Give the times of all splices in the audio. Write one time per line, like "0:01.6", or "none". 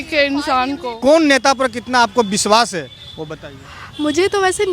0:01.0

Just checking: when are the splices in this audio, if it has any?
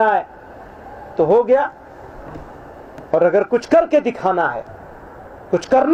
none

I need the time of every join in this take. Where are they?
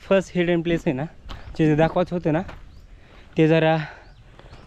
none

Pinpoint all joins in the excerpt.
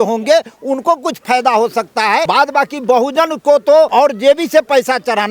0:02.3
0:03.9

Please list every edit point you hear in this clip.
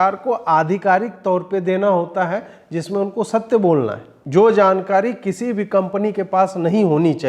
0:04.2

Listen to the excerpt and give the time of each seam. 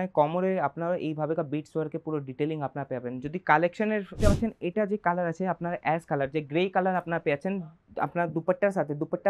0:04.1

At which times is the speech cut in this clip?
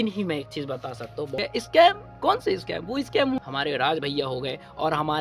0:01.4
0:03.4

